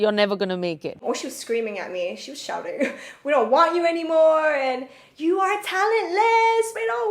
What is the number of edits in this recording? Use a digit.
1